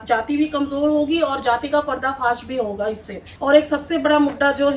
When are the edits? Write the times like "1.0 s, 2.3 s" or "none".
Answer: 3.3 s